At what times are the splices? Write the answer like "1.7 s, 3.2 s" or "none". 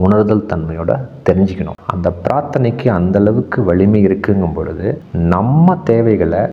1.8 s